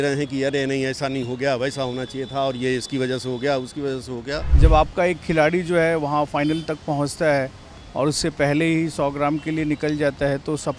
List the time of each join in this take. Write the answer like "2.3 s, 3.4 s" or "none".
4.5 s